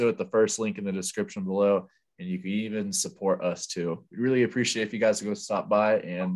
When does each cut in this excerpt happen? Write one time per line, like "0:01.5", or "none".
none